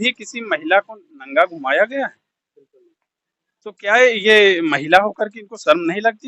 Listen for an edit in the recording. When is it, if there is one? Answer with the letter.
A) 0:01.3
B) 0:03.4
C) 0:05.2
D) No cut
D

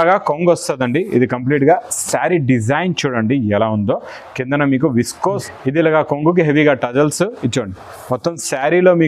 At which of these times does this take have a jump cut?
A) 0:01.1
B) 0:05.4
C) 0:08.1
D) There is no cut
B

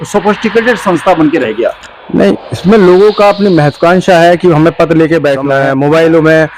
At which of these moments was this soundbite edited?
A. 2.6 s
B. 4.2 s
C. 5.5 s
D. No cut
C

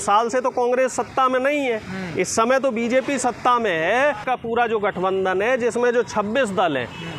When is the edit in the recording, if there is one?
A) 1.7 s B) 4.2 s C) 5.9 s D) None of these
B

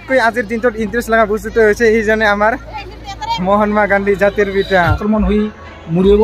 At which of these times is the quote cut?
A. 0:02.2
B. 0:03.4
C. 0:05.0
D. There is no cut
C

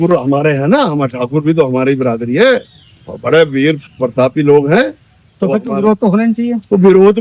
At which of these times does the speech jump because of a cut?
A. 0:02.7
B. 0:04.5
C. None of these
C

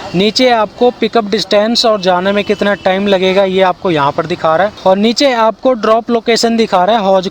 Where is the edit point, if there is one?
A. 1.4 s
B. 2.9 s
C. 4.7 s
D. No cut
C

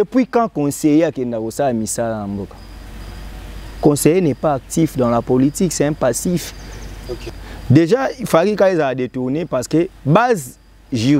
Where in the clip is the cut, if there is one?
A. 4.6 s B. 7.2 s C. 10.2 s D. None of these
B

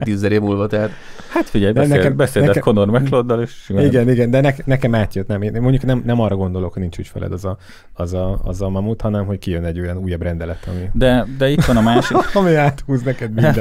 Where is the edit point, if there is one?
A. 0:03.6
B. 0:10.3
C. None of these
C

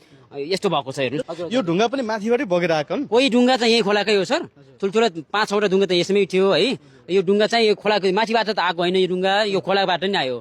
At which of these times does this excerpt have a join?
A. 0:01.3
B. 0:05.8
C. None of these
A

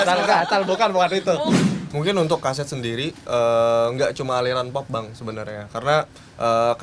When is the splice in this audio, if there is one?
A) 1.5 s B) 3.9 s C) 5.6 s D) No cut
A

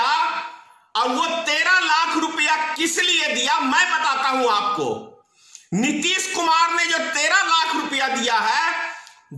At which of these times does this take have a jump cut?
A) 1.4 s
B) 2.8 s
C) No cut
C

